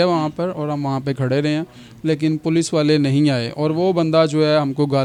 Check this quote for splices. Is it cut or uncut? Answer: uncut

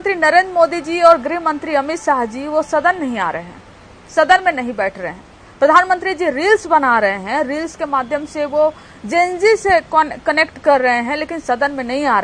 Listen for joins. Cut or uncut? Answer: uncut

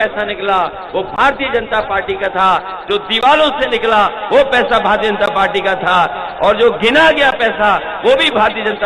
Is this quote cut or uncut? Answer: uncut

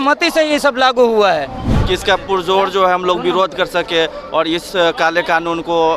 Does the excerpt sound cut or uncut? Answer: cut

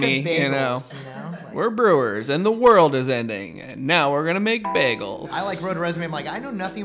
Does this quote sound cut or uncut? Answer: uncut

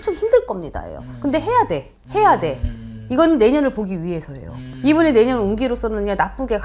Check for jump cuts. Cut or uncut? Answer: uncut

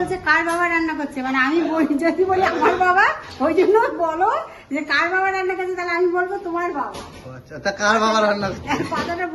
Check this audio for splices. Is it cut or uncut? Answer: uncut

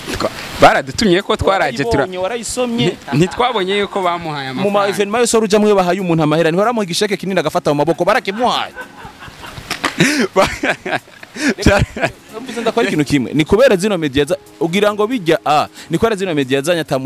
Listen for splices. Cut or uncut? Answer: uncut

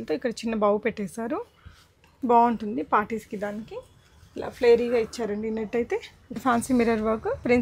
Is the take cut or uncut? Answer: cut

